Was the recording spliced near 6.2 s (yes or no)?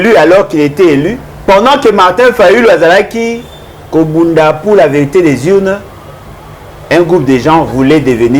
no